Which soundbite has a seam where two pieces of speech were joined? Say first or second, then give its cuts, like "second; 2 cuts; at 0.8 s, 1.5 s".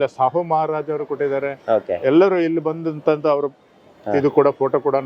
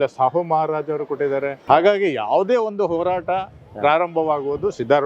second; 1 cut; at 1.6 s